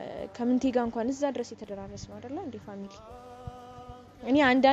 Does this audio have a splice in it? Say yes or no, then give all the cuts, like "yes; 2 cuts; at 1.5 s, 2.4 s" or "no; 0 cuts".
no; 0 cuts